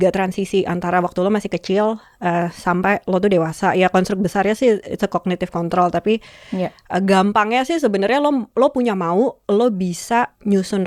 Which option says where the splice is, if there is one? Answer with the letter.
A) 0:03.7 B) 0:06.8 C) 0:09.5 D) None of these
D